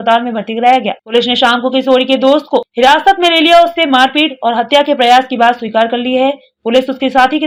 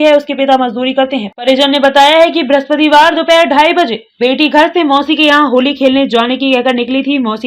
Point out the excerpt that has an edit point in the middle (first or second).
second